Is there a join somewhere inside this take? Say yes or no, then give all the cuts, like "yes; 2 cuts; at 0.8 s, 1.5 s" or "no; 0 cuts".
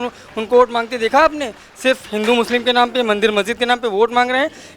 no; 0 cuts